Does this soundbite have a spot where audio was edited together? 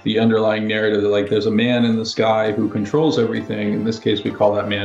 no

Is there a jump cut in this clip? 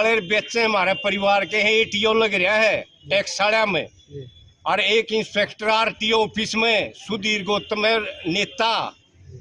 no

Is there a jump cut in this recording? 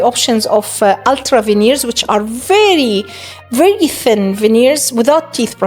no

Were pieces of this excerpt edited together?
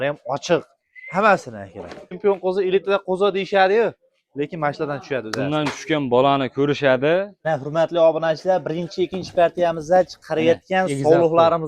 yes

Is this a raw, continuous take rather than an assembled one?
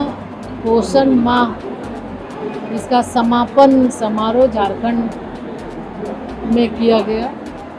yes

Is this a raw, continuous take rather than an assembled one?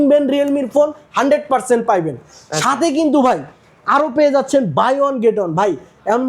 yes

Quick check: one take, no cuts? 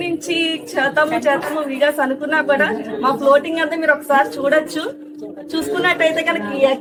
yes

